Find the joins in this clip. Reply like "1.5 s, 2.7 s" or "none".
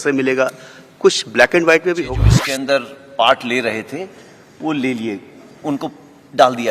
2.3 s